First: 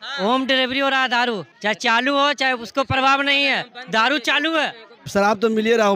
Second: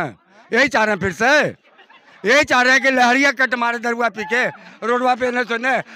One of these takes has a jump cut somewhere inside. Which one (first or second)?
first